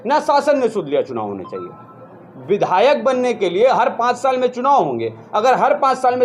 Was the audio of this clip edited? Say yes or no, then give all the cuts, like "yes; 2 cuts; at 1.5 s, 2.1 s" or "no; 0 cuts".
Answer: no; 0 cuts